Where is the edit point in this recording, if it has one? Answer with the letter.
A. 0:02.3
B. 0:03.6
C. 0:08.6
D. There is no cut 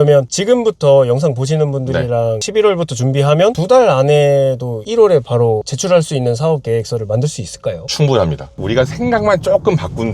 C